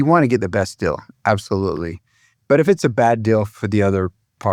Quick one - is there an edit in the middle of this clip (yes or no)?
yes